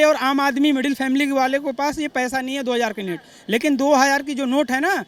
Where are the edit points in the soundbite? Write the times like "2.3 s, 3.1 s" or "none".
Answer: none